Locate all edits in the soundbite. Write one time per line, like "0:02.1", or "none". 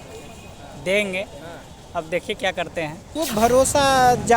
0:03.0